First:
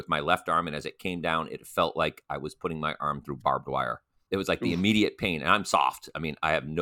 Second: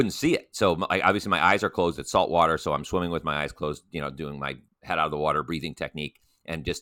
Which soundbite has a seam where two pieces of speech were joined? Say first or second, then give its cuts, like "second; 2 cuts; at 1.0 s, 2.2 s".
first; 1 cut; at 4.1 s